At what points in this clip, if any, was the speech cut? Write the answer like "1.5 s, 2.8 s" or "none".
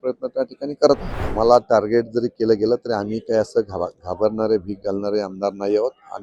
1.2 s

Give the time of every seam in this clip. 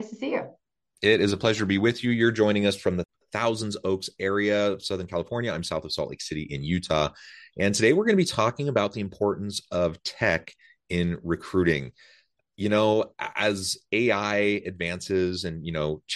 3.0 s

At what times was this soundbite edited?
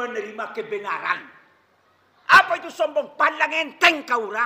none

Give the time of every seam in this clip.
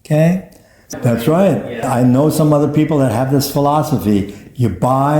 0.9 s, 1.8 s

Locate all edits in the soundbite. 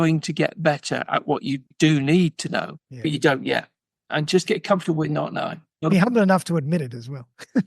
2.8 s, 5.7 s

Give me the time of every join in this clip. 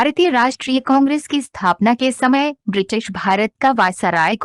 1.8 s

